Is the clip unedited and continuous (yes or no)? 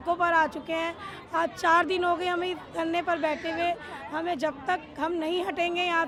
yes